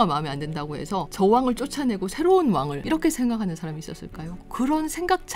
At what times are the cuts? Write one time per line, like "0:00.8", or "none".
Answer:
0:01.1
0:02.8
0:04.2

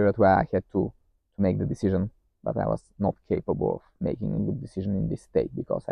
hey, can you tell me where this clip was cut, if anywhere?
none

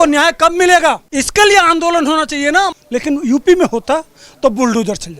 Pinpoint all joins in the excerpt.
0:01.0
0:02.8

